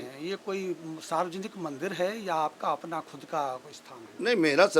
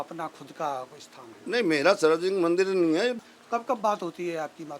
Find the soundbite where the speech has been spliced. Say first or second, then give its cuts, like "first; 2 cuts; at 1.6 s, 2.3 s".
second; 1 cut; at 3.3 s